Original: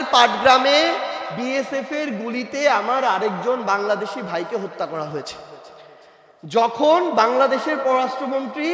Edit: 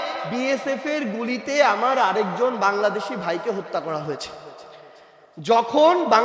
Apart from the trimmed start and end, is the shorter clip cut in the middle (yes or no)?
no